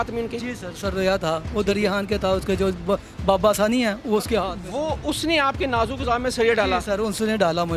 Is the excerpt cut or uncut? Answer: uncut